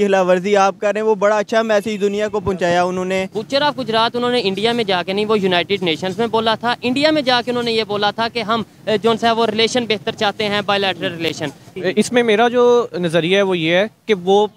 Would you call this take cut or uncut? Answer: cut